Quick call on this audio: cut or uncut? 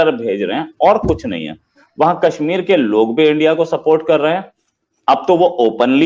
uncut